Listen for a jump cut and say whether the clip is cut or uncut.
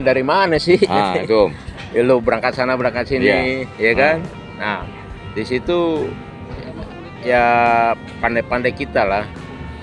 uncut